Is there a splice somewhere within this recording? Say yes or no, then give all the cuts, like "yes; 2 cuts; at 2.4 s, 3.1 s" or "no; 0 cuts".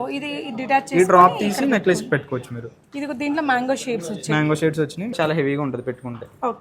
yes; 1 cut; at 5.1 s